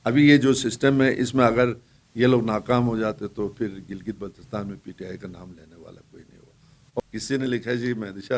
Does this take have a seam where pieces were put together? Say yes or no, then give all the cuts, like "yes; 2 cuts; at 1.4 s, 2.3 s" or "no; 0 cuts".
yes; 1 cut; at 6.8 s